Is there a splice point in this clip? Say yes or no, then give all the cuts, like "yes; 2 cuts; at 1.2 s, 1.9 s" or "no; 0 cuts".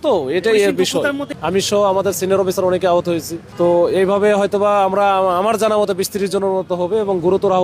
yes; 2 cuts; at 1.3 s, 3.4 s